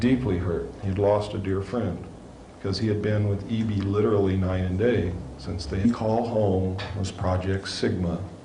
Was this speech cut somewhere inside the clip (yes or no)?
no